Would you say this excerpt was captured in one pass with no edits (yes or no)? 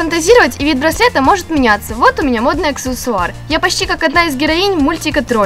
yes